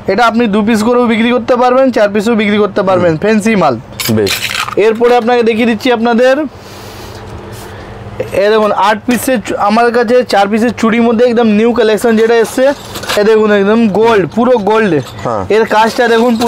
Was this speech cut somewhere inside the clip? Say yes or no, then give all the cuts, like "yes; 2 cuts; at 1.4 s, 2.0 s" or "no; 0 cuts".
no; 0 cuts